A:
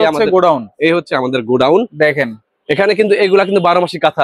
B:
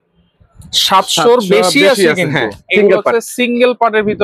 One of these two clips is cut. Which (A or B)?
B